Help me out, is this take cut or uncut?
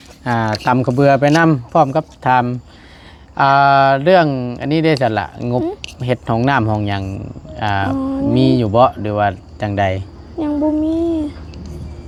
uncut